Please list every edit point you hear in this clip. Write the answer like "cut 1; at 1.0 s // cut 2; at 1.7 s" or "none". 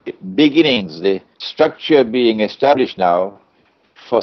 cut 1; at 1.1 s